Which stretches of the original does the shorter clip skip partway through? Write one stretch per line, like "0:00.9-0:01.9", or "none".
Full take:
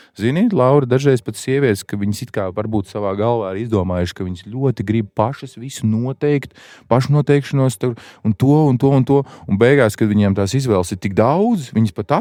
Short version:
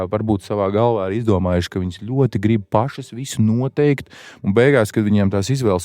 0:06.7-0:09.3

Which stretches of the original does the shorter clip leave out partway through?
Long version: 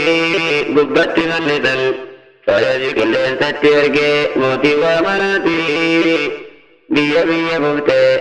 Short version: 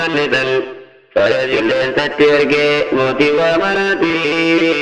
0:02.9-0:03.0

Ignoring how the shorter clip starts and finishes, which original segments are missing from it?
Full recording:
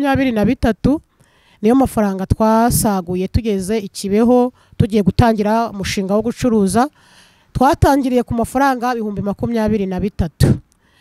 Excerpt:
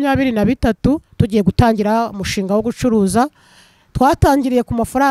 0:01.1-0:04.7

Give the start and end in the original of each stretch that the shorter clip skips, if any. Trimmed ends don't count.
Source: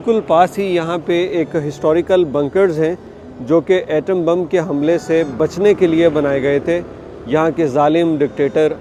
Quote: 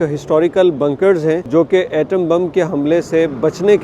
0:03.0-0:03.4

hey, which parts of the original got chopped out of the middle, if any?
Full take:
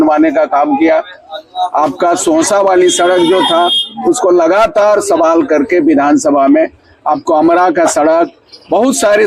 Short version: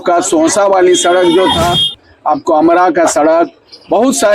0:04.0-0:06.8

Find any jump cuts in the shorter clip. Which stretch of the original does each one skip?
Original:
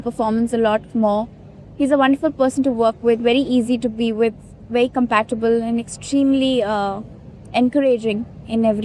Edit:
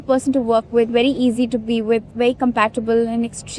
0:04.4-0:04.6

